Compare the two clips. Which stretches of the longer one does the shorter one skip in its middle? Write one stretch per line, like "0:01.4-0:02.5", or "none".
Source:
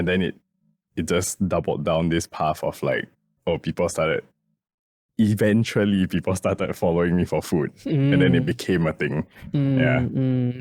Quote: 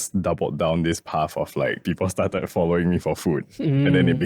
0:03.1-0:06.1